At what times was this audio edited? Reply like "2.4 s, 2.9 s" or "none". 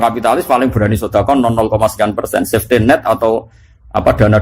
none